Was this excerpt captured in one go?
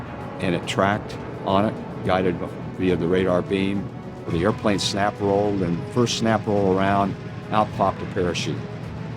no; 1 cut; at 4.3 s

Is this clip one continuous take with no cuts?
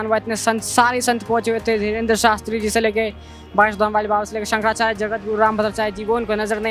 yes; 0 cuts

